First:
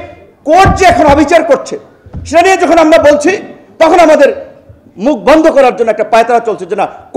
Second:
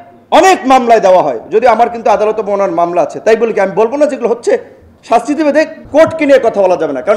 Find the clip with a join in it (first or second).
second